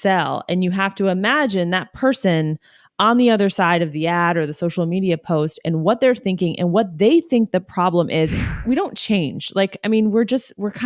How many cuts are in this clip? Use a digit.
1